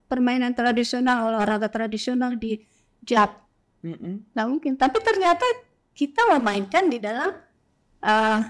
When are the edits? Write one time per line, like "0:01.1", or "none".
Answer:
none